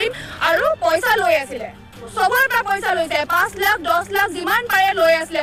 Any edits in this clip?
no; 0 cuts

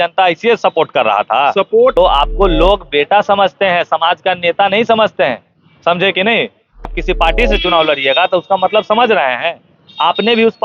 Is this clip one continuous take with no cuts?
no; 2 cuts; at 1.9 s, 6.9 s

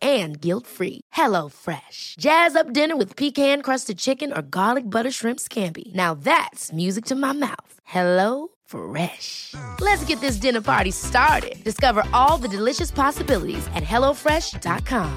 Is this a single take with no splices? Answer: yes; 0 cuts

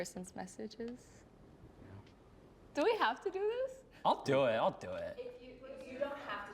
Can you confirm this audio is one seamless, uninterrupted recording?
yes; 0 cuts

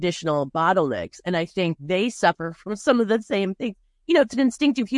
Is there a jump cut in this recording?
no; 0 cuts

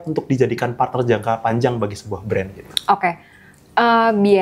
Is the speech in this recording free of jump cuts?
yes; 0 cuts

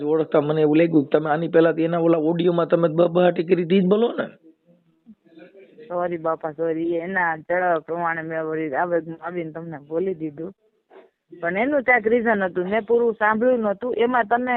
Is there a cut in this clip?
no; 0 cuts

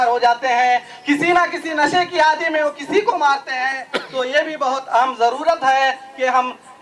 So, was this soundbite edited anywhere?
no; 0 cuts

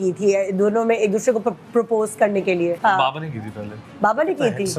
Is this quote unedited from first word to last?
no; 1 cut; at 2.8 s

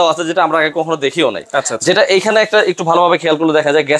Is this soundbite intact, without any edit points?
yes; 0 cuts

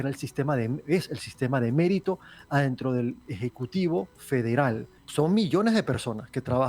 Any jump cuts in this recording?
yes; 1 cut; at 4.9 s

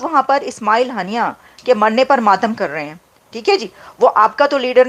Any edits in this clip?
no; 0 cuts

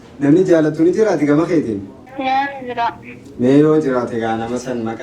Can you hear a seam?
yes; 1 cut; at 2.0 s

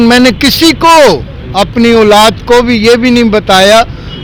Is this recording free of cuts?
yes; 0 cuts

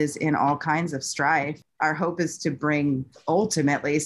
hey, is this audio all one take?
no; 1 cut; at 1.6 s

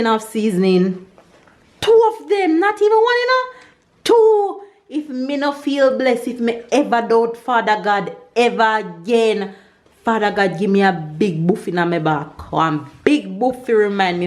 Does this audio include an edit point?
no; 0 cuts

